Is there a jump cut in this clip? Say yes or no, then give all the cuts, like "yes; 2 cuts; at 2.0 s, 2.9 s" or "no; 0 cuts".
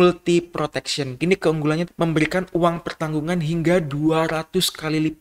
yes; 2 cuts; at 1.2 s, 1.9 s